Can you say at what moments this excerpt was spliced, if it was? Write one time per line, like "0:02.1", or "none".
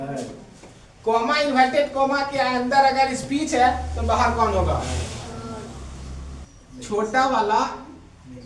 0:06.4